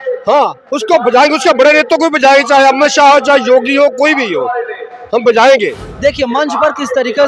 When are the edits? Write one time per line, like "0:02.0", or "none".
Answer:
0:05.8